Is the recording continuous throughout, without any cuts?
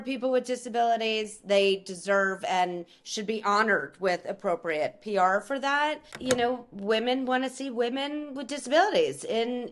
no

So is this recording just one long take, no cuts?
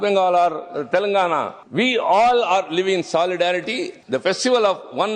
no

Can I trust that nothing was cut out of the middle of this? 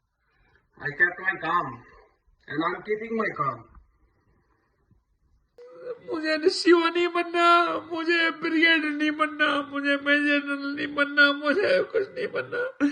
no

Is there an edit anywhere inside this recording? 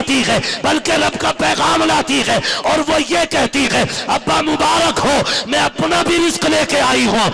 no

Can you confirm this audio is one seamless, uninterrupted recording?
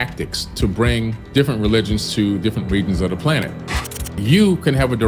no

